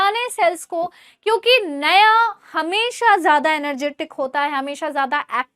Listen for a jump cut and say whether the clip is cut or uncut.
uncut